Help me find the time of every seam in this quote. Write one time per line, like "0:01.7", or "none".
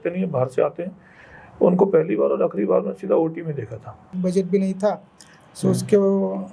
0:04.1